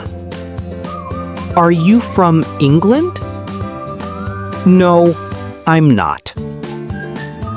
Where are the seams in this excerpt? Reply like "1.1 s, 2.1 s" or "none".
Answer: 3.1 s, 4.6 s

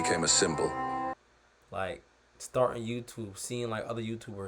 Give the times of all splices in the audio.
1.2 s

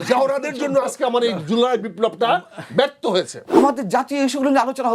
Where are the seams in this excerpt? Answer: 3.6 s

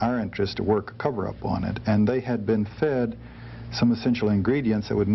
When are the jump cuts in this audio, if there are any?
none

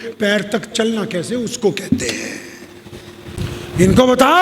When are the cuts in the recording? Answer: 3.4 s

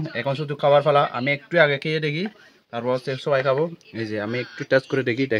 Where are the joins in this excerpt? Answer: none

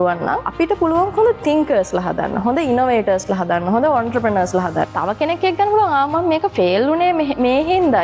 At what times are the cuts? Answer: 4.9 s

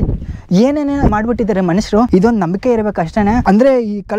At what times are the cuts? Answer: 1.1 s, 2.1 s

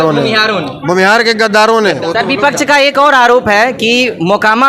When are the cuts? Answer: 2.0 s

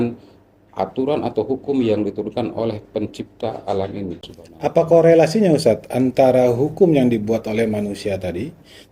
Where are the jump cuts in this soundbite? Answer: 4.2 s

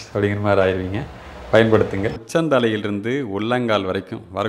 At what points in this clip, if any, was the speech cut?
2.2 s

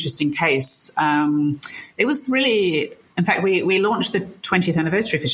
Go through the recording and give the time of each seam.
none

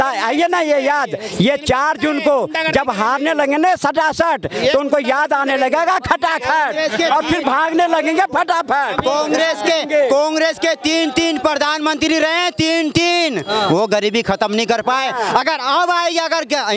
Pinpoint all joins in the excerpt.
none

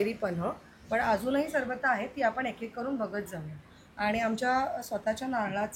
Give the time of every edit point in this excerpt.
none

